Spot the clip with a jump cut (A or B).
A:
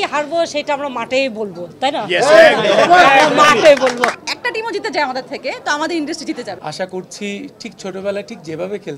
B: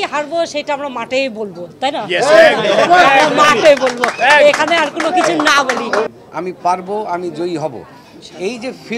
A